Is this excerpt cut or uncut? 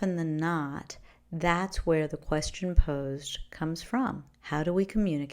cut